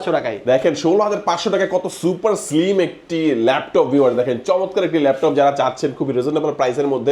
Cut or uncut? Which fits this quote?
uncut